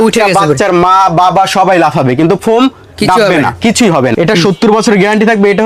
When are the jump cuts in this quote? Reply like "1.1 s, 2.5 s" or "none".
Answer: 4.1 s